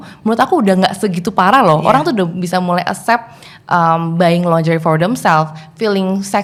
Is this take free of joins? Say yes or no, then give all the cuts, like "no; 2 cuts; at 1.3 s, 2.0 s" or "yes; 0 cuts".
yes; 0 cuts